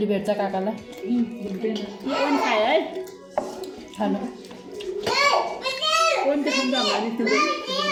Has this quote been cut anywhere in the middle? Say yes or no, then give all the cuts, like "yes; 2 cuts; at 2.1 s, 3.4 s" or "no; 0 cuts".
no; 0 cuts